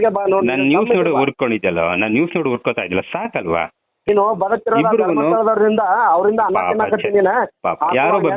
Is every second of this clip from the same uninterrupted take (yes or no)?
no